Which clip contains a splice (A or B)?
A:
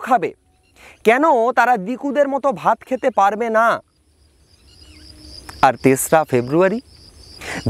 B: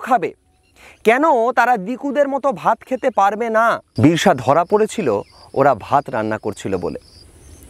B